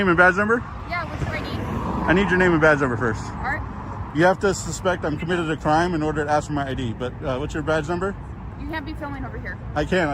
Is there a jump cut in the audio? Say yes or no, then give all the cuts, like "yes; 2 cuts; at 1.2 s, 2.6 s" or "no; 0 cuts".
no; 0 cuts